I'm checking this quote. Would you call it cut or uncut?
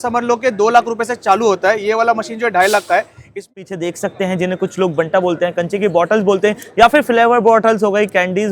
cut